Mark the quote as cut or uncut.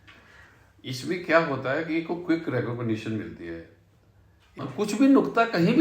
cut